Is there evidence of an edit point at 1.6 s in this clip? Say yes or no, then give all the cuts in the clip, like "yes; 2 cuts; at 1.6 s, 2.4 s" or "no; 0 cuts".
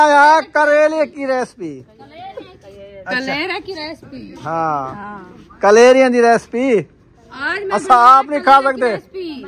no; 0 cuts